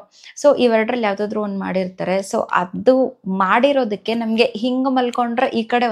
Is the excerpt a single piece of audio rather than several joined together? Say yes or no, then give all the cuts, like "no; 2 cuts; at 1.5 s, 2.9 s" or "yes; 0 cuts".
yes; 0 cuts